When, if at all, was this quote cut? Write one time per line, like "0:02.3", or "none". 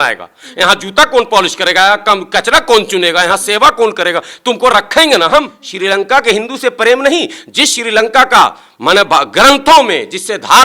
0:05.6